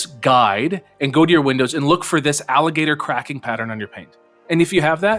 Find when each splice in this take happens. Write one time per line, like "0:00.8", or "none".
none